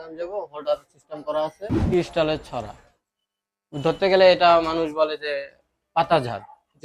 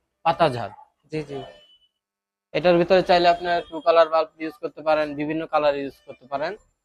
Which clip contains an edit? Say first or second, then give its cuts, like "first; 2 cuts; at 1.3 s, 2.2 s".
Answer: first; 1 cut; at 1.8 s